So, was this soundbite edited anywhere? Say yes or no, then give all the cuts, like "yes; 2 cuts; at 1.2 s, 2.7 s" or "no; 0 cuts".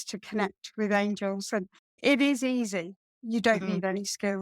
yes; 1 cut; at 2.0 s